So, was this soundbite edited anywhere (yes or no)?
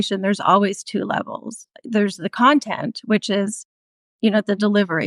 yes